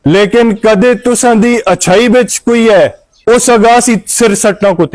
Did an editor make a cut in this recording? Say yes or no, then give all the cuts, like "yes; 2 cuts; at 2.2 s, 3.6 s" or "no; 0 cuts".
yes; 1 cut; at 3.1 s